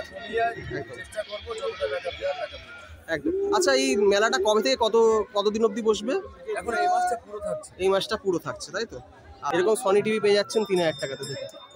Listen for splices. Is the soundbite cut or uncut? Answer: cut